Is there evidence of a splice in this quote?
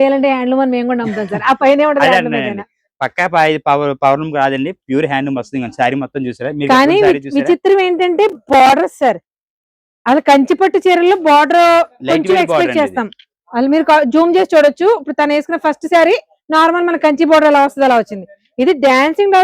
no; 0 cuts

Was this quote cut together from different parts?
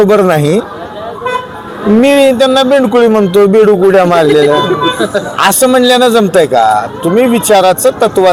no; 0 cuts

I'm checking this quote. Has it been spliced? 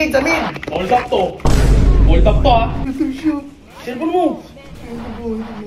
yes; 1 cut; at 2.9 s

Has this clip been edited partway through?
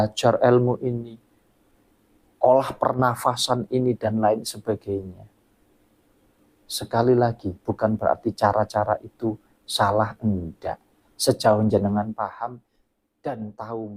no; 0 cuts

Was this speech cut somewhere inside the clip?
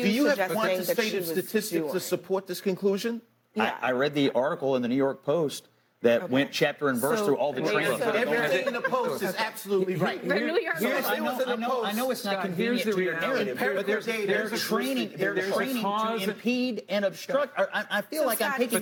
no; 0 cuts

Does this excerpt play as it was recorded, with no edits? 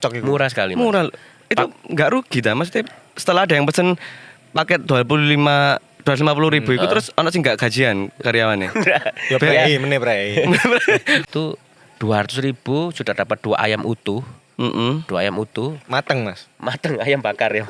no; 1 cut; at 11.2 s

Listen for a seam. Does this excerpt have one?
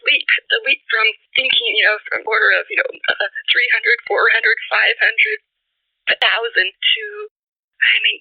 yes; 1 cut; at 6.2 s

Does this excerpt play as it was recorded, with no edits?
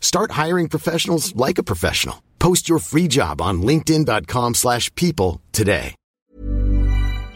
no; 1 cut; at 6.2 s

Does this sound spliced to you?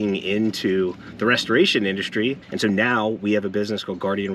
yes; 1 cut; at 2.5 s

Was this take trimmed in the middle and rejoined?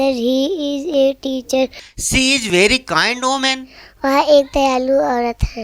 yes; 1 cut; at 1.9 s

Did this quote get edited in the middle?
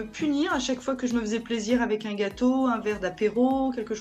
no; 0 cuts

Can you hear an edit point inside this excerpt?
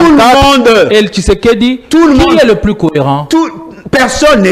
no; 0 cuts

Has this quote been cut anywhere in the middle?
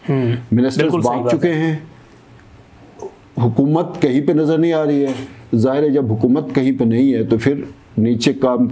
no; 0 cuts

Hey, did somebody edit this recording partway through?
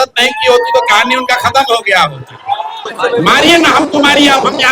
yes; 1 cut; at 2.9 s

